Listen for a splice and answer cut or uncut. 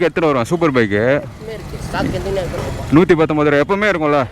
cut